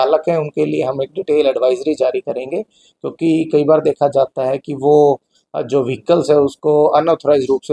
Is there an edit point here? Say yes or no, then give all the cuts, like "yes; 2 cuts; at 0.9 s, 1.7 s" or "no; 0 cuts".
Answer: no; 0 cuts